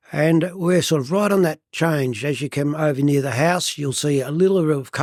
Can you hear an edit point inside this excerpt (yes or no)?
no